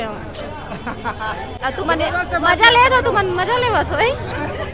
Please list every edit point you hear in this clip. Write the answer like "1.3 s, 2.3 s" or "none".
none